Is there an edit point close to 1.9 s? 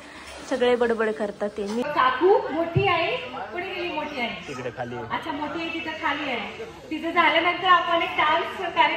yes; 1 cut; at 1.9 s

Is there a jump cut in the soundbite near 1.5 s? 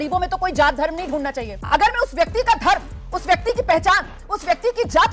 yes; 1 cut; at 1.5 s

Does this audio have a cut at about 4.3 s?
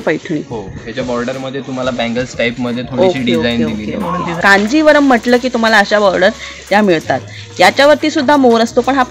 yes; 1 cut; at 4.3 s

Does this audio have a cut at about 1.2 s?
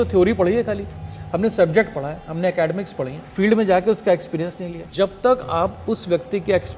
no; 2 cuts; at 3.2 s, 4.8 s

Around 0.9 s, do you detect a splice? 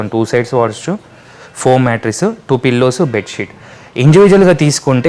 no; 0 cuts

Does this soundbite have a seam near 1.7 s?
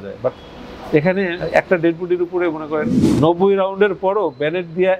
no; 1 cut; at 3.0 s

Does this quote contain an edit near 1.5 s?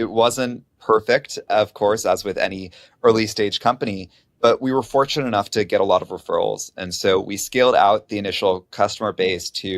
yes; 1 cut; at 1.5 s

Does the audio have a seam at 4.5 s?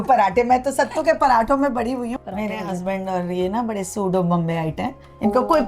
no; 1 cut; at 2.1 s

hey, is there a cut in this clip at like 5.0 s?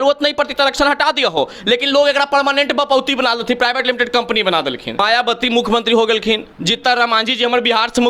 yes; 1 cut; at 5.0 s

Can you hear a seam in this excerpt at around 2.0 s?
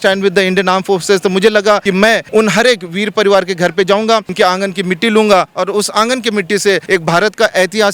yes; 3 cuts; at 2.0 s, 4.3 s, 6.8 s

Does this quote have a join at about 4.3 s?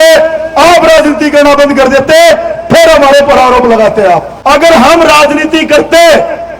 yes; 1 cut; at 4.3 s

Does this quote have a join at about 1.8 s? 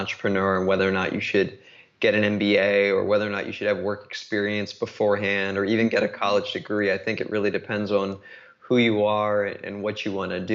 no; 0 cuts

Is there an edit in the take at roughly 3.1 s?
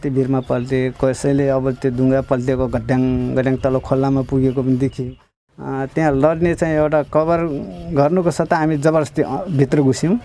no; 1 cut; at 5.3 s

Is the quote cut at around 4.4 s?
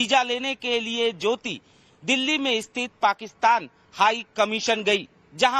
no; 1 cut; at 2.1 s

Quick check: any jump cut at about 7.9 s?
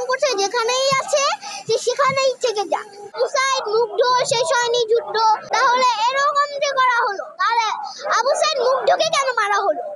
no; 1 cut; at 3.2 s

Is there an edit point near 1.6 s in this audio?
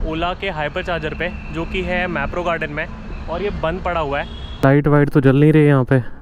no; 1 cut; at 4.6 s

